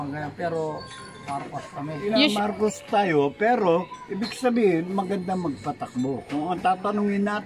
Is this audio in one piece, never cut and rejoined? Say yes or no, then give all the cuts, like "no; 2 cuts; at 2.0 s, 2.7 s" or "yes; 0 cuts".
no; 1 cut; at 2.0 s